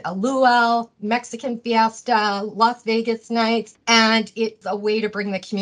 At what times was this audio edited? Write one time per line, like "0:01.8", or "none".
0:03.7
0:04.6